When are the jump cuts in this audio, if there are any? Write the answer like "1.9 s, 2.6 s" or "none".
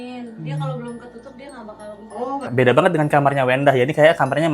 2.5 s